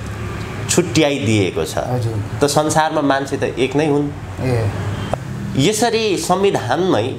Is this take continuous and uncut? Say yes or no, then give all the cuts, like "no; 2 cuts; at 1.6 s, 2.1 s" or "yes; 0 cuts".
no; 1 cut; at 5.1 s